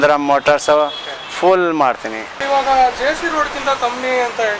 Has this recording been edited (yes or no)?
yes